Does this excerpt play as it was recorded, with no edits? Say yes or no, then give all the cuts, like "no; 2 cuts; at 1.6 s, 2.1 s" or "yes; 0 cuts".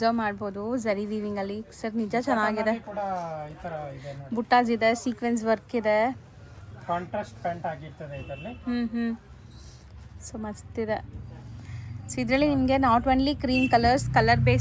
yes; 0 cuts